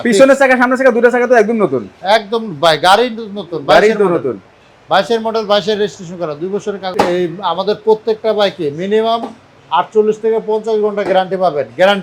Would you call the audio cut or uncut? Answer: cut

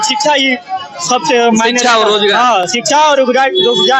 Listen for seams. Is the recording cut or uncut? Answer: uncut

